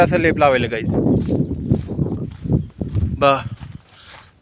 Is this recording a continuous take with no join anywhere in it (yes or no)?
yes